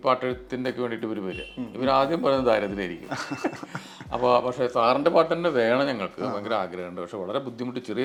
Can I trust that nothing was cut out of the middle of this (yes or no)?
yes